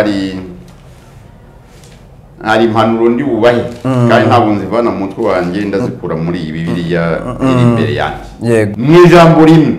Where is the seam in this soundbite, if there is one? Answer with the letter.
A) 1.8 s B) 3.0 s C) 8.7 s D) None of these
C